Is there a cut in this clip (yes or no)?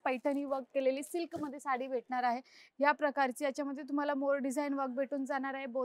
no